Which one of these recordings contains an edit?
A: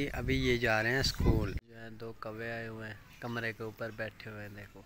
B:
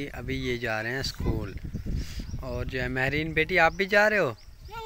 A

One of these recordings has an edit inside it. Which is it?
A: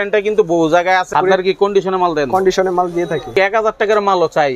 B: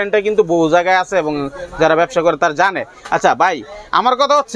A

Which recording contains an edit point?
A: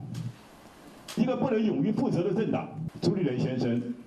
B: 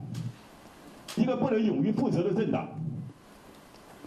A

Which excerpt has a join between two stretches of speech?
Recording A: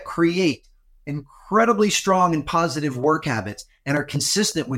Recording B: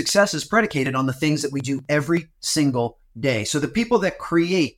B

